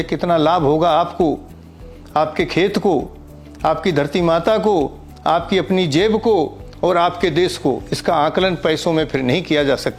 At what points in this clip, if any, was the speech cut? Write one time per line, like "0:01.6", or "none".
none